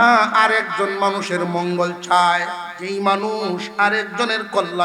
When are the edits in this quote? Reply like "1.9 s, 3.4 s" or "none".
2.7 s